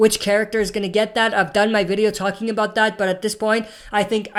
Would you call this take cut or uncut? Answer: uncut